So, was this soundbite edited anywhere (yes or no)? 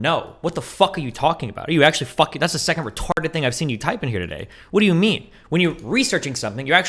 no